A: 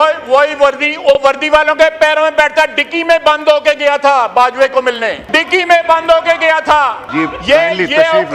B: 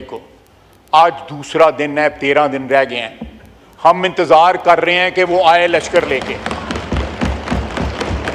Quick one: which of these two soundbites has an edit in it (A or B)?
A